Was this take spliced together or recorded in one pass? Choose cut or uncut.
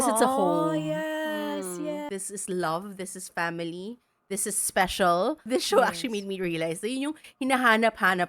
cut